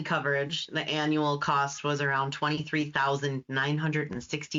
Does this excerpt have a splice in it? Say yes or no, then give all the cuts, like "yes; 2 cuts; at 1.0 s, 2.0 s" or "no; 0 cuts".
no; 0 cuts